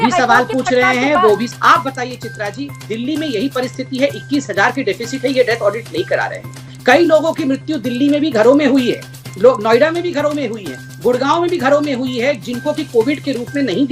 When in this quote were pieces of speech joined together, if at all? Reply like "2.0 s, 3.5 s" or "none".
none